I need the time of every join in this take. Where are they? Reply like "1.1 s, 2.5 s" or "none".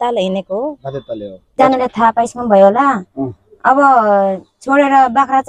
1.5 s